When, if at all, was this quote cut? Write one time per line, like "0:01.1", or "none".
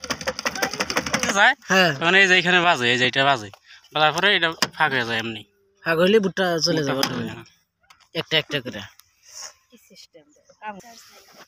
0:01.3